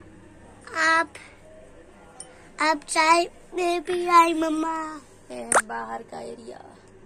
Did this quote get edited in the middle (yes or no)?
no